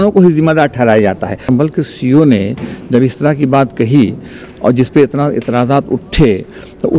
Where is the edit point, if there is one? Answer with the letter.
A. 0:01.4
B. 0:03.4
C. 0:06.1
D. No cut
A